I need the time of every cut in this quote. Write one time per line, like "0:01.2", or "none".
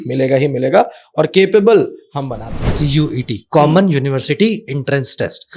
0:02.8